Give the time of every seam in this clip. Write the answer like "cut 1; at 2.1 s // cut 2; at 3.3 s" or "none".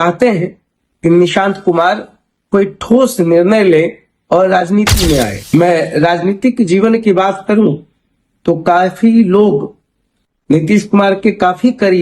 cut 1; at 5.4 s